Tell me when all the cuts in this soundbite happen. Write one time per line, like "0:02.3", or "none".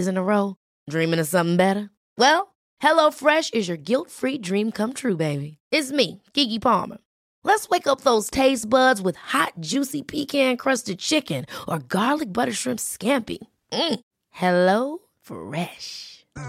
none